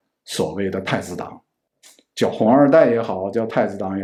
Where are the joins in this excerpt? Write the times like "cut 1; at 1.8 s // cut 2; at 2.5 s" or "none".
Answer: none